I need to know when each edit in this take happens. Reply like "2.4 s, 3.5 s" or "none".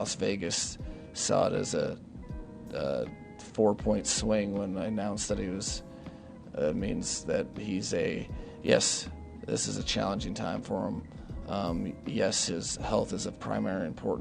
11.2 s